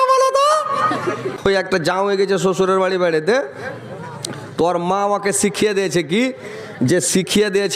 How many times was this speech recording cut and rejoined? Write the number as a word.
one